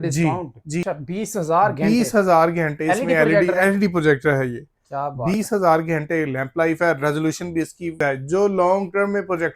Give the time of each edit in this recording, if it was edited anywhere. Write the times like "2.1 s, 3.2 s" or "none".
0.8 s, 8.0 s